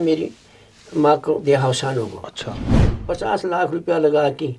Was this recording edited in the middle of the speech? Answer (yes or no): yes